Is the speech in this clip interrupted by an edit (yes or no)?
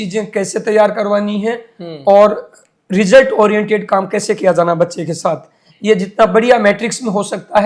no